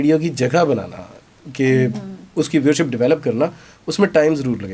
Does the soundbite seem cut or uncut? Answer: uncut